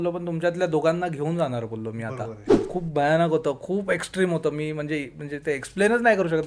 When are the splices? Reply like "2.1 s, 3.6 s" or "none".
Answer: 2.6 s